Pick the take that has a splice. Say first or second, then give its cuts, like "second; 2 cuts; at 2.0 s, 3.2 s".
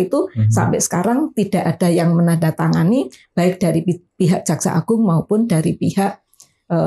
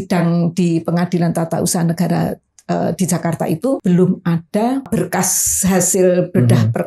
second; 2 cuts; at 3.8 s, 4.9 s